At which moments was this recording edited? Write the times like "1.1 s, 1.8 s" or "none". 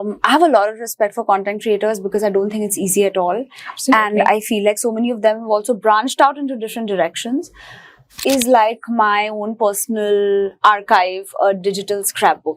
8.1 s